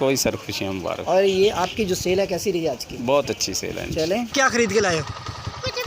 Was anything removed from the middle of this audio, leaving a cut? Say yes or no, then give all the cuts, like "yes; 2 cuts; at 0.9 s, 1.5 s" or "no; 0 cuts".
yes; 1 cut; at 4.3 s